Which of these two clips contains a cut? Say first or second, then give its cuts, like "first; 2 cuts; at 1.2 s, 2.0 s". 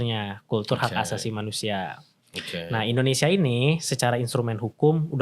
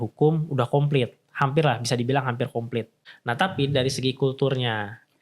second; 1 cut; at 3.0 s